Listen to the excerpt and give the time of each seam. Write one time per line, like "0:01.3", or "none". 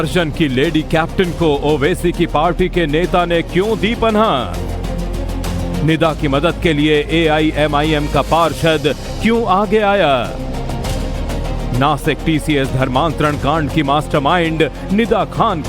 0:07.3